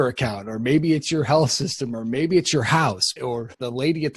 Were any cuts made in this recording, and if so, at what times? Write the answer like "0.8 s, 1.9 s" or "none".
3.2 s